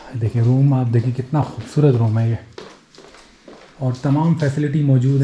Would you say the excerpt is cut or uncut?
uncut